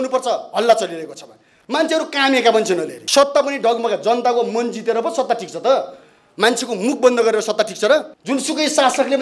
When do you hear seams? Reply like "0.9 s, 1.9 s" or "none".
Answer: 3.0 s, 8.2 s